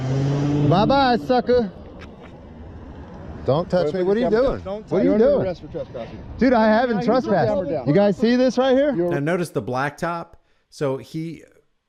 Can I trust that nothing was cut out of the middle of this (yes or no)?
yes